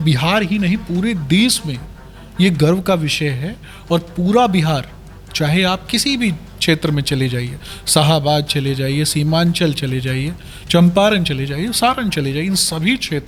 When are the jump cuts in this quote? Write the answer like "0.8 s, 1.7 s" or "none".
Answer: none